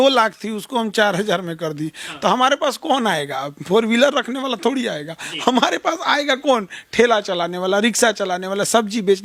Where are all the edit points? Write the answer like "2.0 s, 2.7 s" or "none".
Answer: none